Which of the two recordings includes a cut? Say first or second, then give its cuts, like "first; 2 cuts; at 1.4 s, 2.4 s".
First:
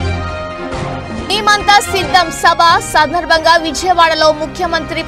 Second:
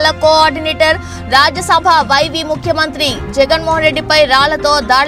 first; 1 cut; at 1.0 s